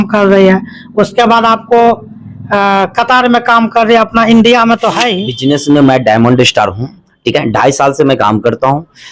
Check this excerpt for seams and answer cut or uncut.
cut